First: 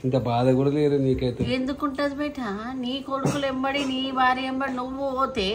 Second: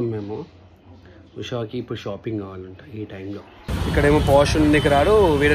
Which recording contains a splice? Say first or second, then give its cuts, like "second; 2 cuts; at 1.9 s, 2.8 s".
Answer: second; 1 cut; at 3.7 s